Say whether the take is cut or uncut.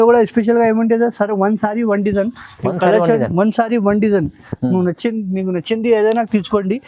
uncut